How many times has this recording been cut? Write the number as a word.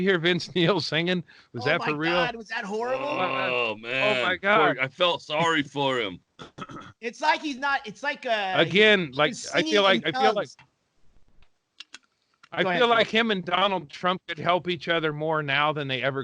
one